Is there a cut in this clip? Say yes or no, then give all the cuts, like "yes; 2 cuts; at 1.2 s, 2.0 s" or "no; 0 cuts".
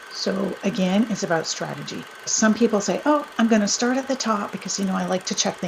yes; 1 cut; at 2.3 s